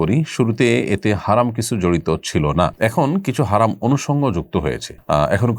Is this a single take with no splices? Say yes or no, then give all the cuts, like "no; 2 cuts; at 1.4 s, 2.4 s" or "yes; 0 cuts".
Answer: yes; 0 cuts